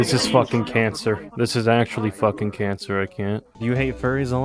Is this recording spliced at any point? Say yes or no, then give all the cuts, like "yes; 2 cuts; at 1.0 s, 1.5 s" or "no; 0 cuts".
yes; 1 cut; at 3.5 s